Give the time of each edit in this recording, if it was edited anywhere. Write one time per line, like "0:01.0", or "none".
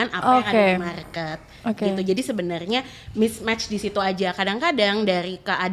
none